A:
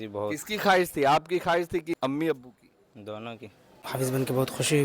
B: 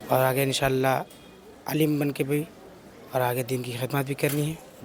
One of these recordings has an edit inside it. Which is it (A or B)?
A